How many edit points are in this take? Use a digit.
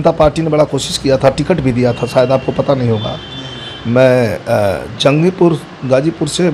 0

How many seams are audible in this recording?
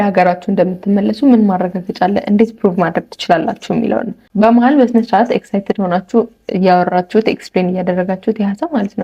1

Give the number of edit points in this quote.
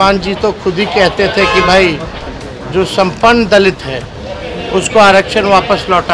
0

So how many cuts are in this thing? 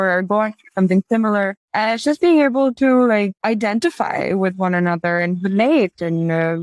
2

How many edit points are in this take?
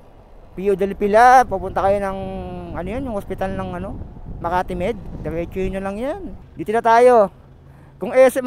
1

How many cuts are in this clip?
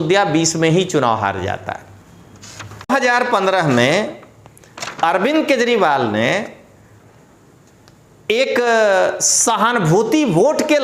1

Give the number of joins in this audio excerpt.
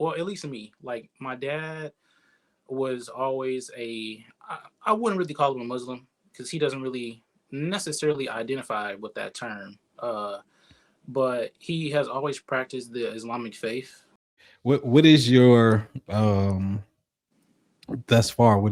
1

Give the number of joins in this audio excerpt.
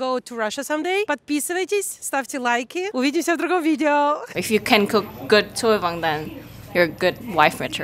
3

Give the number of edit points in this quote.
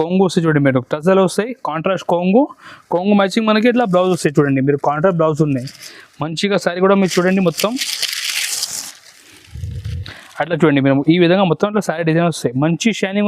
0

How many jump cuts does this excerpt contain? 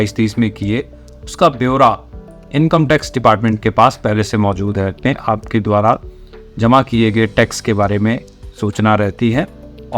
1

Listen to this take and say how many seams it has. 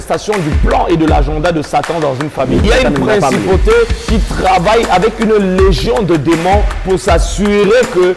1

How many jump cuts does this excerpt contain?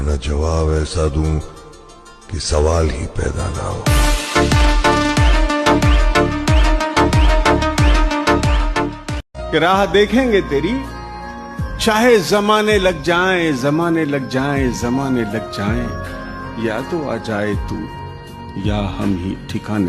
1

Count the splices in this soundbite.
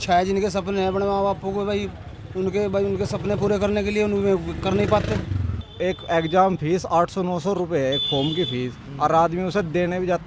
1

